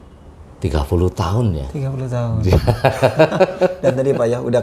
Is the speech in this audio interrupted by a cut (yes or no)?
no